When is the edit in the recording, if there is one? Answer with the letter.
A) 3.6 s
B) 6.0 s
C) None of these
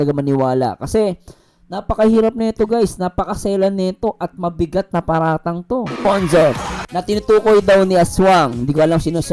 B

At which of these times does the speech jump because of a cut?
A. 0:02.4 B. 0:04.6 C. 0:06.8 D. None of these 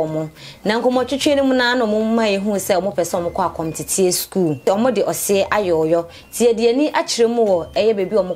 B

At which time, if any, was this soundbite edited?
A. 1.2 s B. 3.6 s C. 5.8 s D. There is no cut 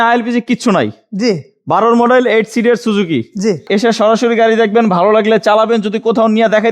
B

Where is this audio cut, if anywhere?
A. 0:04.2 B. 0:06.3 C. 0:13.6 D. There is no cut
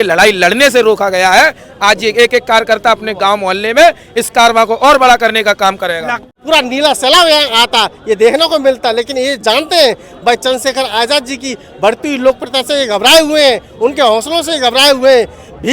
B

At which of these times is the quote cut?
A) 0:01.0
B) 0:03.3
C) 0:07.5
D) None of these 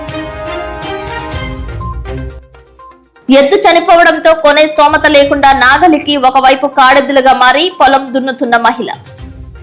D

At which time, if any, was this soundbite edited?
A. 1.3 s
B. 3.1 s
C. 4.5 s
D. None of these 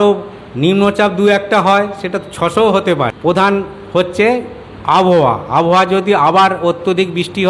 B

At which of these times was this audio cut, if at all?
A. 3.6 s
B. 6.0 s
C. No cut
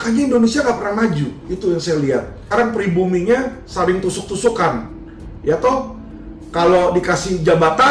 C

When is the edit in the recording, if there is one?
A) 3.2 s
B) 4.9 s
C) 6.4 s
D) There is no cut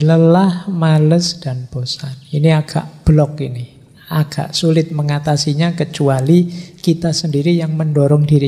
D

